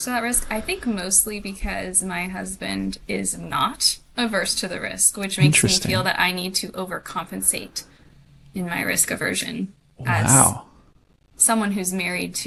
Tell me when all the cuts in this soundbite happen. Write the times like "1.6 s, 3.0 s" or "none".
none